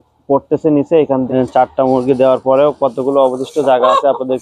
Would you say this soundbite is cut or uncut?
cut